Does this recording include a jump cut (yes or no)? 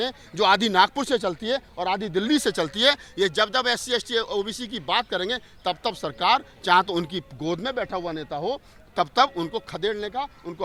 no